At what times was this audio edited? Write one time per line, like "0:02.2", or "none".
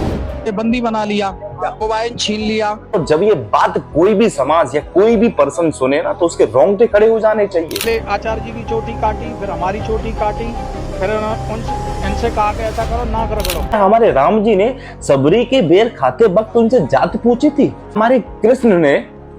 0:01.8
0:02.9
0:07.8
0:13.7
0:18.0